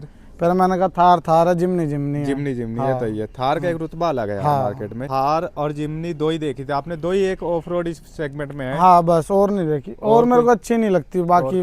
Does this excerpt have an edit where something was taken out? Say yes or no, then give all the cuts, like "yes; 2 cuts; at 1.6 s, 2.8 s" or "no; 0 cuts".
no; 0 cuts